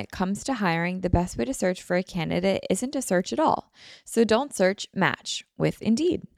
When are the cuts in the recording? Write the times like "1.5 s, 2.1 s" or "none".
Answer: none